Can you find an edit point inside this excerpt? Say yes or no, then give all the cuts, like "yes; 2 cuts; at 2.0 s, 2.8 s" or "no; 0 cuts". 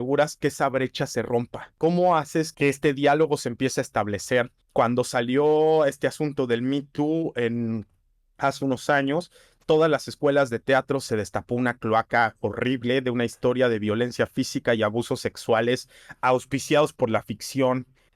yes; 3 cuts; at 1.6 s, 2.5 s, 4.6 s